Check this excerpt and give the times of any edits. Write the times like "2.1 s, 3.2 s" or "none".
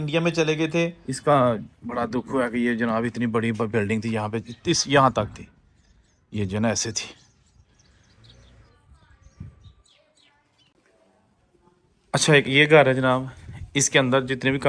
1.1 s, 8.1 s